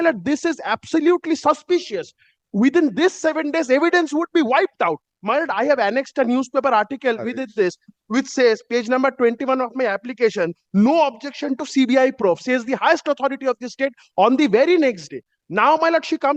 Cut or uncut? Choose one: uncut